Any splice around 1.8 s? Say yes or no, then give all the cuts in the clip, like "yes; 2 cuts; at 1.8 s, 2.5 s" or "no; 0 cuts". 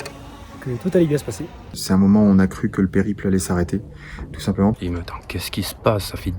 yes; 2 cuts; at 1.8 s, 4.8 s